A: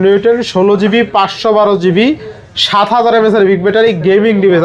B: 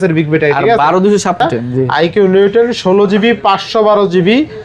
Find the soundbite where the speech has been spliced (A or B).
B